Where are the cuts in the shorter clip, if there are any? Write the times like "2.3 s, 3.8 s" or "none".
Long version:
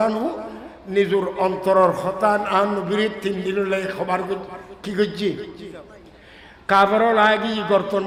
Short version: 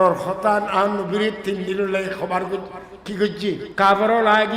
3.7 s